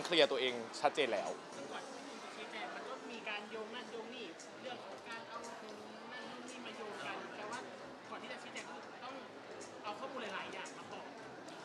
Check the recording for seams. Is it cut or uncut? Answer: uncut